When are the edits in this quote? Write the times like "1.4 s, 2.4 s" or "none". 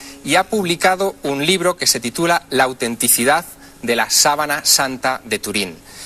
none